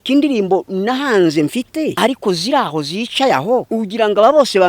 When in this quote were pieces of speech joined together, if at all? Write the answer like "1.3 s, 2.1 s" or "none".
1.9 s, 3.7 s